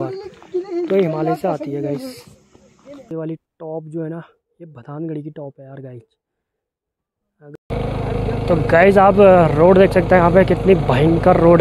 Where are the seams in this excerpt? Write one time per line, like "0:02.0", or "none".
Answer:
0:03.1
0:07.7